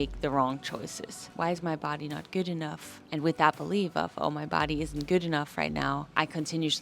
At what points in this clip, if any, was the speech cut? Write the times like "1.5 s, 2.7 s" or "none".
1.3 s